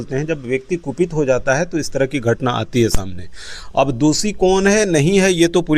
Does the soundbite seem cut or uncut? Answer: uncut